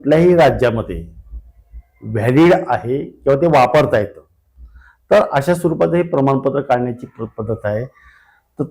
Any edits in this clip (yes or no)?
no